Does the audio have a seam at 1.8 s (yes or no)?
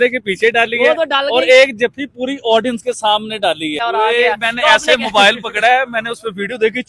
no